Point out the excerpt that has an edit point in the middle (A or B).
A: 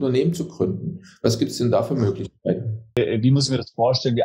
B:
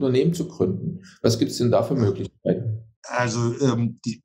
A